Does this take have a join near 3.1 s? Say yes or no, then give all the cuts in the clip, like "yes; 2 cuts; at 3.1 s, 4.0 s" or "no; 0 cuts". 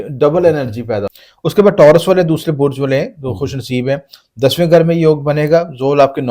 no; 1 cut; at 1.2 s